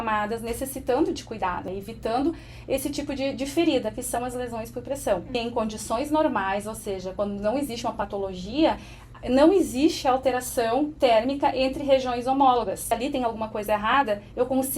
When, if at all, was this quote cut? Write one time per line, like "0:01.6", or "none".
0:01.7
0:05.3
0:13.0